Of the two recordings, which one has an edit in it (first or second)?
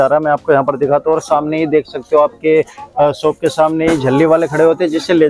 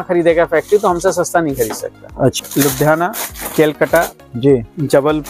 second